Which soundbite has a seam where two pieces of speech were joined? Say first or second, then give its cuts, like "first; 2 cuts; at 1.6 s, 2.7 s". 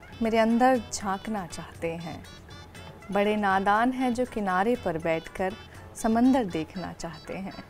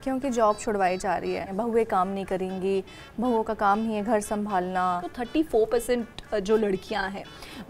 second; 2 cuts; at 1.5 s, 5.2 s